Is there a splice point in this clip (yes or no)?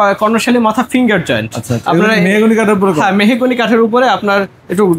no